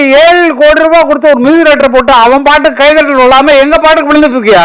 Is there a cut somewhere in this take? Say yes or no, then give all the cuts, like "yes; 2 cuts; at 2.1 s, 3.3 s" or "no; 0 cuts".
no; 0 cuts